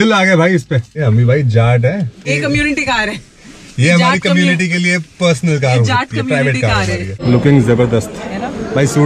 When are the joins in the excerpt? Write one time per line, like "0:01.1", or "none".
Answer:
0:00.9
0:02.3
0:07.1

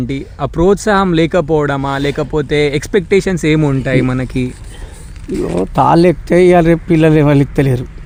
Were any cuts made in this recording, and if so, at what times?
none

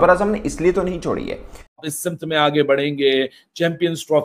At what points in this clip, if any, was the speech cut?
0:01.9

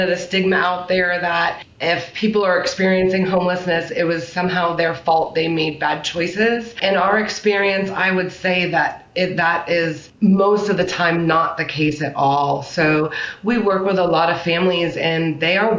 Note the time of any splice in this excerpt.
0:01.7
0:03.8
0:06.8
0:10.0

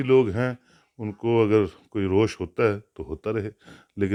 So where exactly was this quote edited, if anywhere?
none

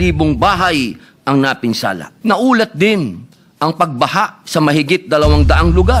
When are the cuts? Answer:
0:02.1

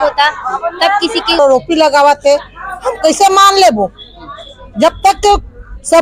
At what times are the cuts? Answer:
0:01.4

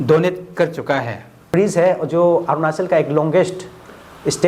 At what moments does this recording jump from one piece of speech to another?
0:01.4

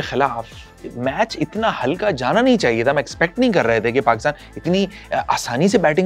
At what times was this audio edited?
none

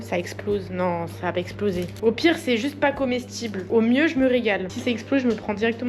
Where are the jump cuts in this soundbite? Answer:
0:02.0
0:04.7

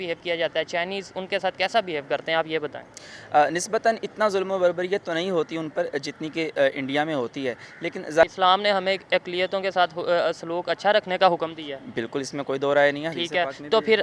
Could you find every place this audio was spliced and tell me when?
0:08.2

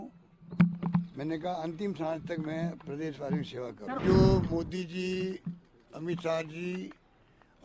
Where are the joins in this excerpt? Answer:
0:04.0

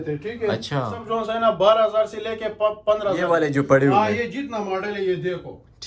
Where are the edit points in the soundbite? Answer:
0:01.0
0:03.3

